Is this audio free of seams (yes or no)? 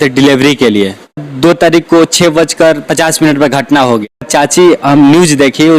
no